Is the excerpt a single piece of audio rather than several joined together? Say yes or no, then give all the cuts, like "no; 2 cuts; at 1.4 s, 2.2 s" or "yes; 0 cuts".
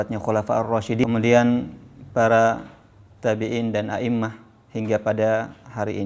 no; 1 cut; at 1.0 s